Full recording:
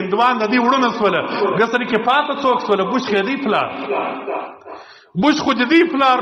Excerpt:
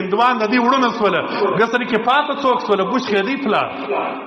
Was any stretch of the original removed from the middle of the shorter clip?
no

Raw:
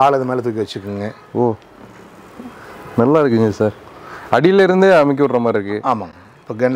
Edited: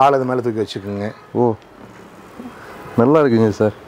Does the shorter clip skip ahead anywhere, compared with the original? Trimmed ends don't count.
no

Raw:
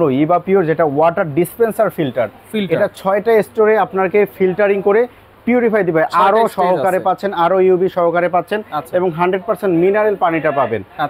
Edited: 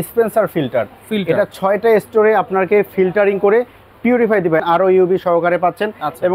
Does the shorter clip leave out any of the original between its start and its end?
yes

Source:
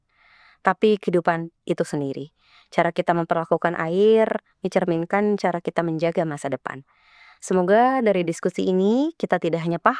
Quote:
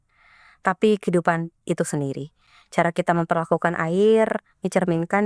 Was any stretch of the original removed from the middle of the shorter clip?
no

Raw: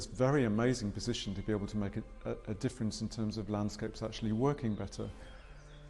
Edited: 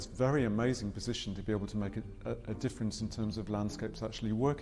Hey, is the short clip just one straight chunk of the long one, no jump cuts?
yes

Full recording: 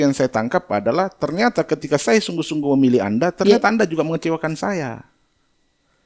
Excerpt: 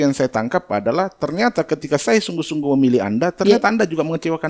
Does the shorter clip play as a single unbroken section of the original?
yes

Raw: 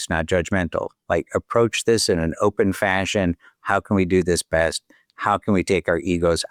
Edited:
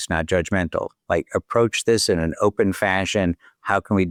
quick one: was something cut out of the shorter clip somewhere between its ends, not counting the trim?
no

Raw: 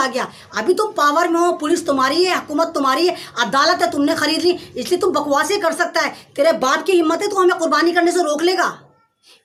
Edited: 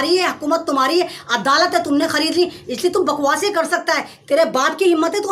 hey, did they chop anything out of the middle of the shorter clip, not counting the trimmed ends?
no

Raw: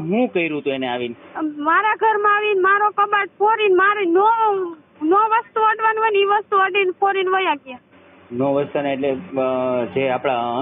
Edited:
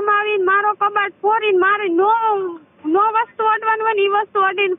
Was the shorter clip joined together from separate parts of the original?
no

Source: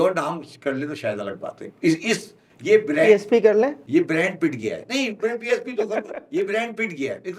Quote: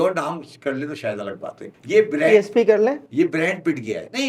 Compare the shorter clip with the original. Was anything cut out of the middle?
yes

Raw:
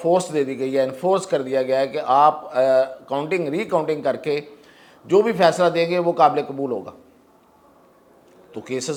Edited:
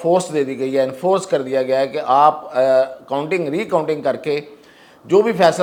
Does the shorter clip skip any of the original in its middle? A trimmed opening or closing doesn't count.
no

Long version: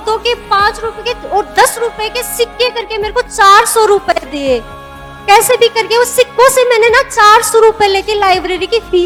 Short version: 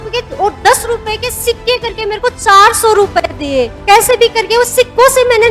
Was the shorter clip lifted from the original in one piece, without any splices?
no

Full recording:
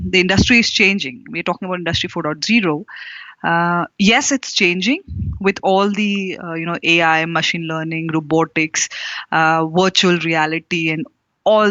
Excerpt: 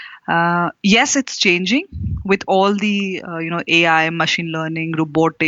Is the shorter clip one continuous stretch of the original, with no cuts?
yes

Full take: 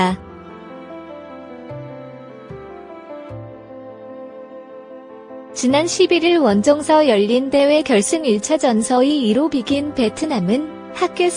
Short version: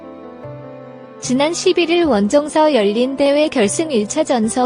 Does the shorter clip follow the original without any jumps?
no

